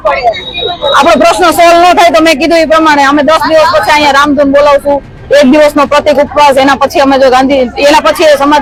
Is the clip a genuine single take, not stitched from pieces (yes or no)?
yes